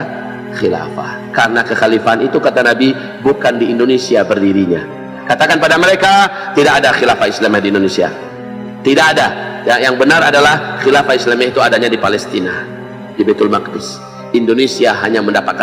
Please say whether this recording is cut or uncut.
cut